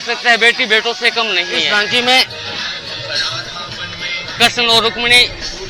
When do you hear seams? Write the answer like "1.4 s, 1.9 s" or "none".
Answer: 1.7 s